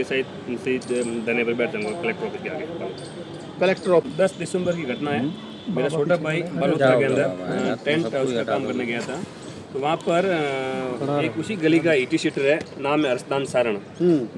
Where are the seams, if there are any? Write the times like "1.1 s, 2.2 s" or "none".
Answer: 4.1 s